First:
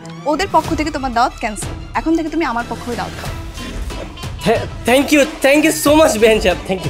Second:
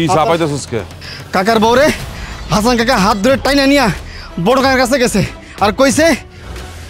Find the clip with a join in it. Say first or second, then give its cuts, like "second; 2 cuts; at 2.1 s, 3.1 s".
second; 1 cut; at 1.0 s